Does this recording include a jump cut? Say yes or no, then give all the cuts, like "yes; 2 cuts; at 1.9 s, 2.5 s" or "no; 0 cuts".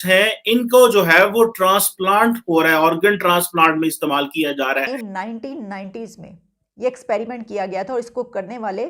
yes; 1 cut; at 4.9 s